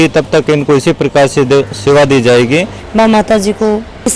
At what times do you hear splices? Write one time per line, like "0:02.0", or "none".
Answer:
0:02.7